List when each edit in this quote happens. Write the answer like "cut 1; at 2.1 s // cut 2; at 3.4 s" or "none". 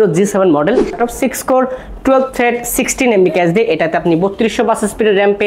cut 1; at 0.9 s